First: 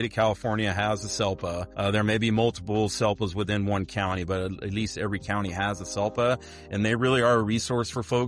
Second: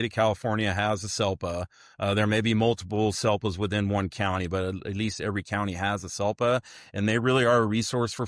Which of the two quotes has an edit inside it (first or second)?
first